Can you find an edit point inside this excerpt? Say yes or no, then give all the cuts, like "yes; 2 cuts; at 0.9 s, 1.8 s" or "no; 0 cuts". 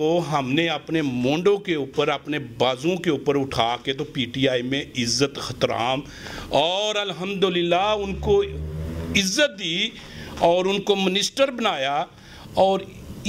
no; 0 cuts